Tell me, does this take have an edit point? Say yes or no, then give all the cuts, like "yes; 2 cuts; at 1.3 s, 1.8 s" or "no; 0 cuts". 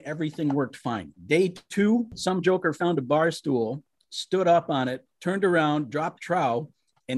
yes; 3 cuts; at 1.1 s, 2.1 s, 5.1 s